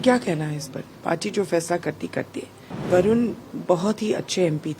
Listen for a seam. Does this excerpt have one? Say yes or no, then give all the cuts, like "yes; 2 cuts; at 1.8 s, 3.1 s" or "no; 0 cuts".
yes; 2 cuts; at 2.9 s, 3.5 s